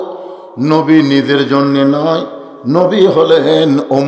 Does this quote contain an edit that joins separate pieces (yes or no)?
no